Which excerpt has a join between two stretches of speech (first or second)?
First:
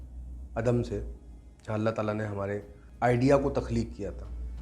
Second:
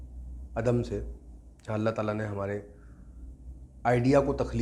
first